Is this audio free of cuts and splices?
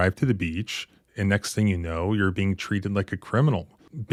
yes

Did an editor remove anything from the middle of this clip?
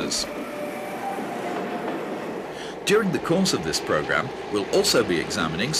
yes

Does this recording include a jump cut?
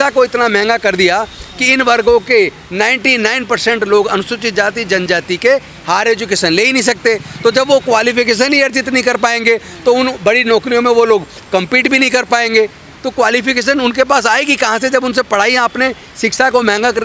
no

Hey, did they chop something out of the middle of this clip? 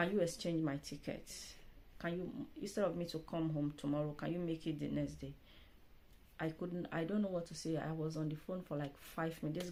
no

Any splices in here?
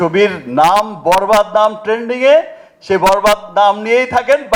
no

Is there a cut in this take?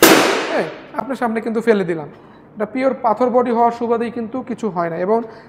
no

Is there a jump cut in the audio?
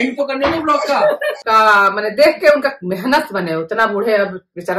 yes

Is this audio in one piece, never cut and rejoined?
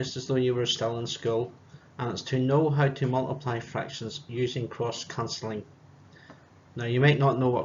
yes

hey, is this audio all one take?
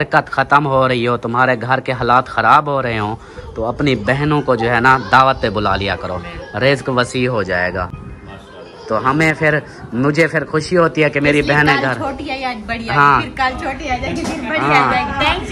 yes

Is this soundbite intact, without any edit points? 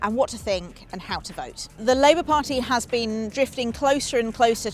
no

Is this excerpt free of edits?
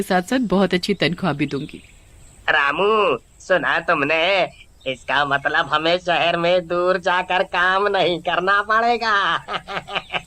yes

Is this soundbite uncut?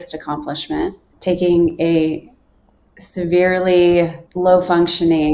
no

